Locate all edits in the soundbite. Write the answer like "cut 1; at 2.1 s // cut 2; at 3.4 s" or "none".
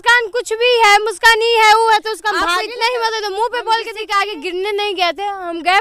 cut 1; at 2.4 s // cut 2; at 4.0 s